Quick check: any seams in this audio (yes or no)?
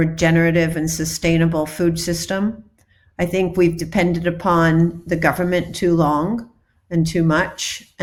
no